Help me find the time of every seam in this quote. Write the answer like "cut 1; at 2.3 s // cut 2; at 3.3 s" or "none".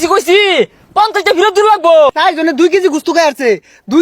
cut 1; at 2.2 s